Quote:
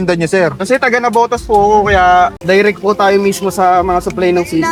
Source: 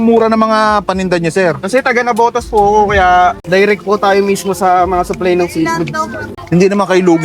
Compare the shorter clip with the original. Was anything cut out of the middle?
no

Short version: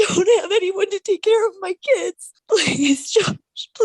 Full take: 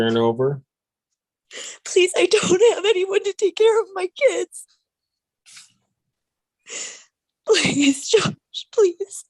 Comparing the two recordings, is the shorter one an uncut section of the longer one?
no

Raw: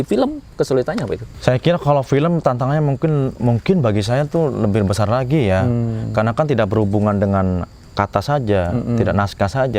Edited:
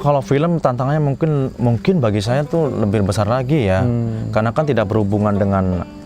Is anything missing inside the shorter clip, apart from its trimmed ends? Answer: no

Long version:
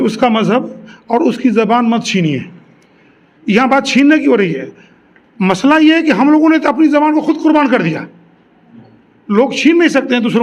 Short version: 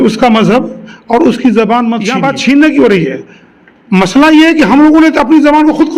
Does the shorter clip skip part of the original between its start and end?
yes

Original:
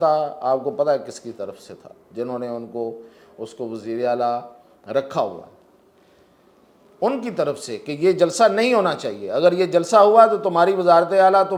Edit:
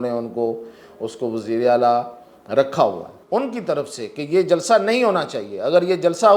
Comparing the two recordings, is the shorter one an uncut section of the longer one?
no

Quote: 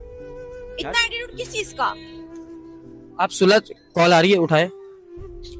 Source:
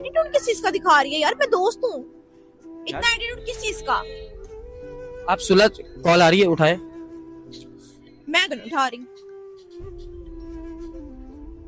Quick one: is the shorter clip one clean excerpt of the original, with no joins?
no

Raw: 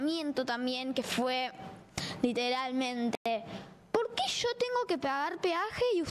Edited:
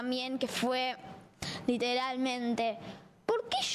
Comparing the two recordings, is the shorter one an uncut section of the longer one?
no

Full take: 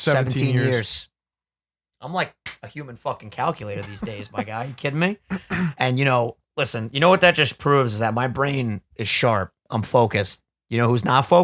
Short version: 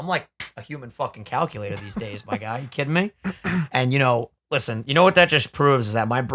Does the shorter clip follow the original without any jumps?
yes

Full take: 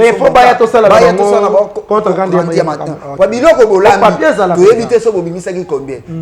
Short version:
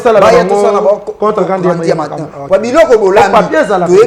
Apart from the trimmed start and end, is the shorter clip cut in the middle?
no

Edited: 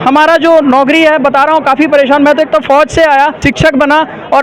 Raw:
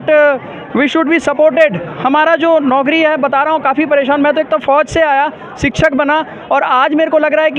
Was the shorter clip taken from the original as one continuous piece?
no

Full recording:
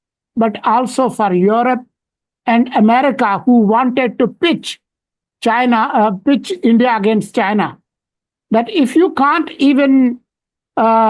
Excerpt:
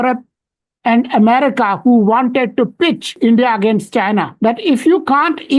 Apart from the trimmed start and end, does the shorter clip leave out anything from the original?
yes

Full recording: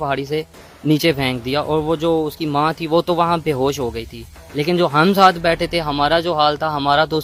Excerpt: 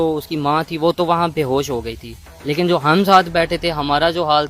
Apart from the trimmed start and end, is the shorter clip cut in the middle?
no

